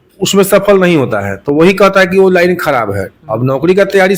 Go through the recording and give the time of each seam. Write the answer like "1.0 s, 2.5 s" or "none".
none